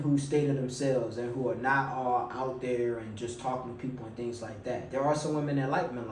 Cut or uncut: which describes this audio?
uncut